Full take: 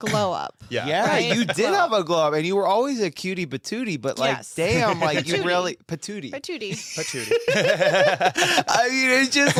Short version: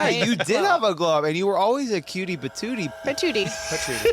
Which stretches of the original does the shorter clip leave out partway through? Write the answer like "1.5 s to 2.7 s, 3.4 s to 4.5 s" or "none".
4.0 s to 6.2 s